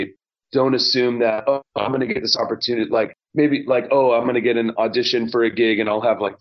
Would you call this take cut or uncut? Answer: uncut